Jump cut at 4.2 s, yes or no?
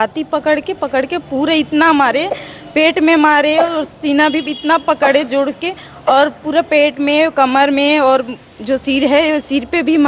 no